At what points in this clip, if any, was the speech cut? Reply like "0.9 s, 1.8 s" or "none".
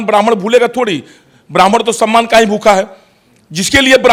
none